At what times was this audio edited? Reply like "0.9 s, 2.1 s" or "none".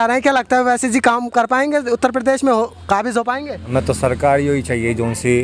3.6 s